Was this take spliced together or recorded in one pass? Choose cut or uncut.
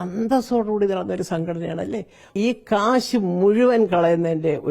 cut